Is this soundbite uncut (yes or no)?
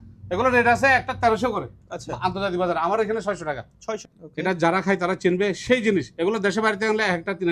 no